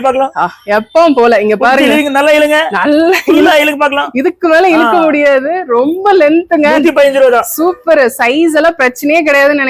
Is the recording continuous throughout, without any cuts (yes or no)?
yes